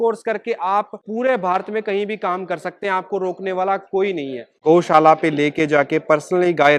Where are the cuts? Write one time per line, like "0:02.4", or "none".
0:04.5